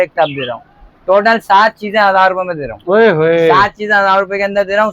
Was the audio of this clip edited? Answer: no; 0 cuts

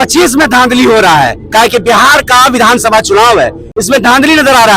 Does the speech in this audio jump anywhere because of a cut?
no; 0 cuts

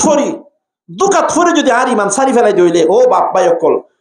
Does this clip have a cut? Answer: no; 0 cuts

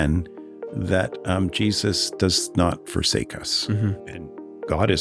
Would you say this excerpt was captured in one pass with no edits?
no; 1 cut; at 4.0 s

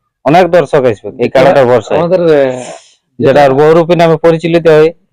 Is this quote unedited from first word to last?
yes; 0 cuts

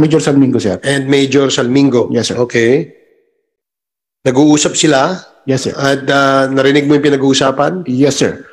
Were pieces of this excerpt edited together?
no; 0 cuts

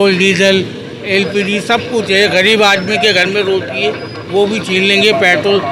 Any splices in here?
no; 0 cuts

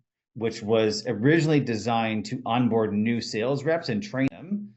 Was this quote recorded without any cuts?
yes; 0 cuts

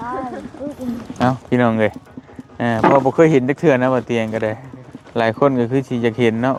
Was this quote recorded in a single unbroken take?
yes; 0 cuts

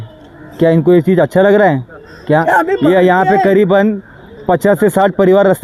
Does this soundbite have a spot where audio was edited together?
no; 0 cuts

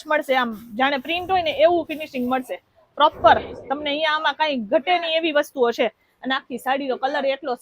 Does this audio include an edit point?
no; 0 cuts

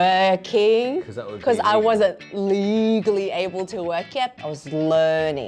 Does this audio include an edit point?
yes; 1 cut; at 4.4 s

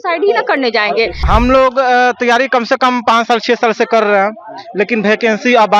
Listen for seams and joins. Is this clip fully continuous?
no; 1 cut; at 1.2 s

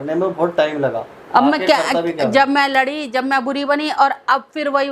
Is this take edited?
yes; 1 cut; at 1.1 s

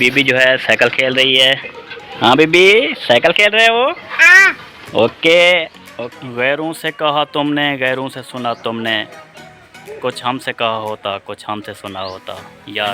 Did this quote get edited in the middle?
yes; 1 cut; at 5.8 s

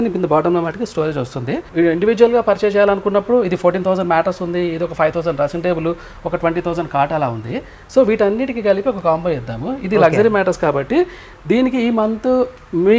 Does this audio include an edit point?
no; 0 cuts

